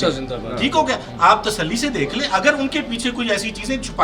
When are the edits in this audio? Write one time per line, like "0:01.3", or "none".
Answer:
none